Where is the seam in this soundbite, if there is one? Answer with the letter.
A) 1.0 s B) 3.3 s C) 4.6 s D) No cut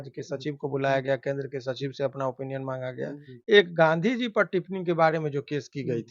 B